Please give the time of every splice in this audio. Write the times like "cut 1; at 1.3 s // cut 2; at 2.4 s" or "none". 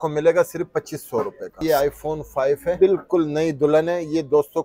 cut 1; at 1.6 s // cut 2; at 2.8 s